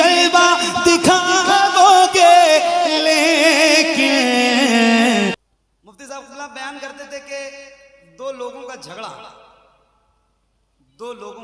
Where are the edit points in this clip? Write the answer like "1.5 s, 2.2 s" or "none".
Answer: 5.4 s